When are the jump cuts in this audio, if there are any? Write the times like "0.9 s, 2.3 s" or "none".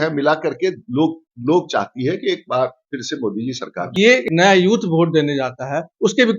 4.2 s